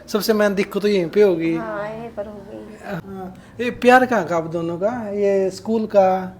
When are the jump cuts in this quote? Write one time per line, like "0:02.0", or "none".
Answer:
0:03.0